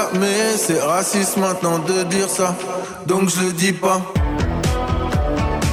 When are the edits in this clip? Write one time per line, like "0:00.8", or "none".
none